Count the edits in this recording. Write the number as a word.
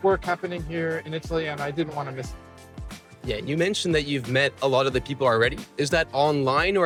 zero